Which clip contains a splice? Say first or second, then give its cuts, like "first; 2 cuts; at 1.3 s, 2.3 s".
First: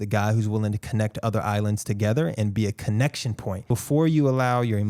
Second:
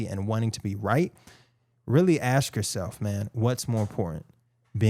first; 1 cut; at 3.7 s